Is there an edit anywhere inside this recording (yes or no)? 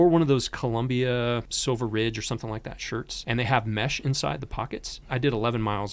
yes